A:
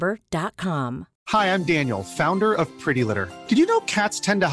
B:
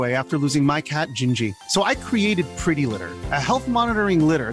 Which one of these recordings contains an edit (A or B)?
A